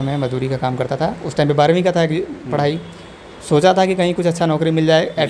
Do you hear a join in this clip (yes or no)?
no